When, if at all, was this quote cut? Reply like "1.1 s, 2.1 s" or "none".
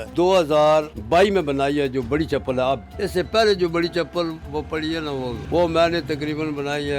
1.0 s, 2.9 s, 5.4 s

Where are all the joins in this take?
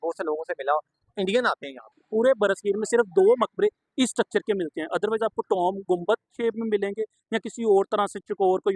1.8 s

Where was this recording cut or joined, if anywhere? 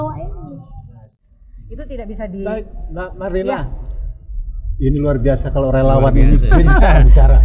1.2 s

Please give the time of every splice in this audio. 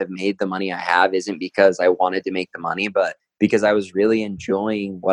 3.2 s

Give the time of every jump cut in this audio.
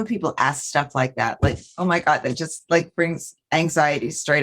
none

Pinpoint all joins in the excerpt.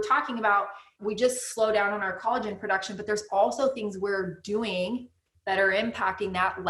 0.9 s, 2.1 s

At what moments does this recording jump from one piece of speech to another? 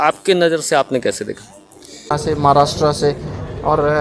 2.1 s

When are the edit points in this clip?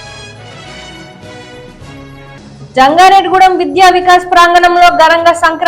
1.7 s

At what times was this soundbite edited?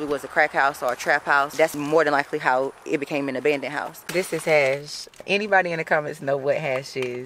1.7 s, 4.0 s, 5.2 s

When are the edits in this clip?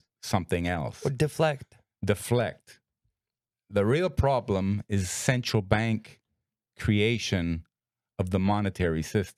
none

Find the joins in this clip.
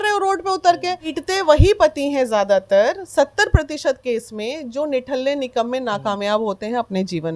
1.1 s

